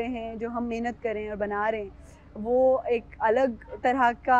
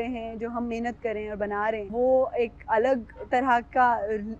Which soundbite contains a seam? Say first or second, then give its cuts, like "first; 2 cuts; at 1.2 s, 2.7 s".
second; 1 cut; at 1.9 s